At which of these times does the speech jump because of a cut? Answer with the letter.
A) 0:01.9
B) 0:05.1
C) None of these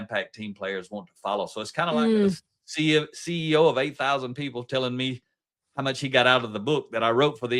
A